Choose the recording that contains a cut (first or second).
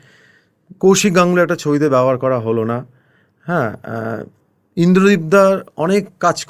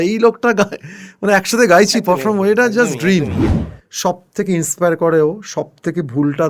second